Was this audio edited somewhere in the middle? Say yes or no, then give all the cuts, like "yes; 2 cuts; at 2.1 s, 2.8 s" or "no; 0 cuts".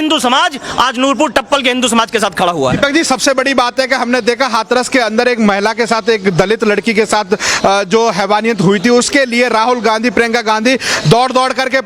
no; 0 cuts